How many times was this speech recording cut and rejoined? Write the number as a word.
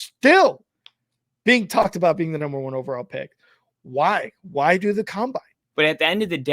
one